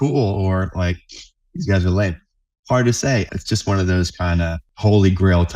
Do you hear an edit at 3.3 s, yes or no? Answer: yes